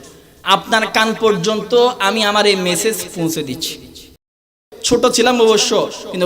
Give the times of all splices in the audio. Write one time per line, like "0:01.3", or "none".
0:04.6